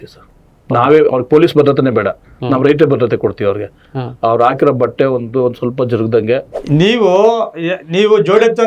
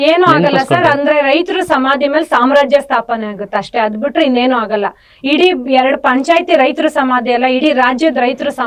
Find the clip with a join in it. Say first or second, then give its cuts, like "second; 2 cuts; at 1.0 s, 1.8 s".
first; 1 cut; at 6.5 s